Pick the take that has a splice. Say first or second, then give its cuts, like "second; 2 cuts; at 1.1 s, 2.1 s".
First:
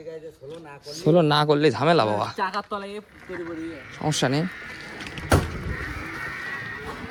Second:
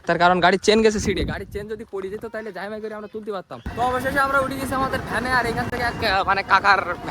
second; 1 cut; at 3.6 s